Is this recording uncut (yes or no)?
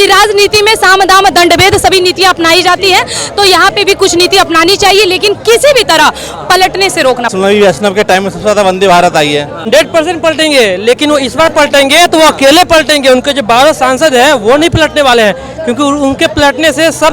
no